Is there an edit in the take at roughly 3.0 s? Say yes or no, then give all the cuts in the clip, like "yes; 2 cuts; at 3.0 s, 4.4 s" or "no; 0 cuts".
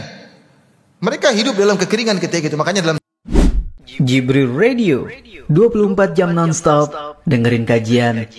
yes; 1 cut; at 3.0 s